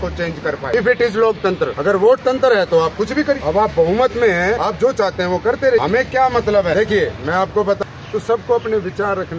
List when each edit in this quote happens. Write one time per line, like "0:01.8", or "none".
0:00.7
0:01.8
0:03.4
0:04.6
0:05.8
0:06.7
0:07.8